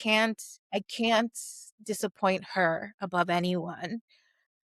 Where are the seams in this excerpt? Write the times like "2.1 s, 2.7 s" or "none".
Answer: none